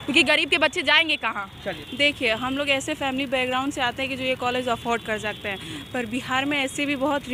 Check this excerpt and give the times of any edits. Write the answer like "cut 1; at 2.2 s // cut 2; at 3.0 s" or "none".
none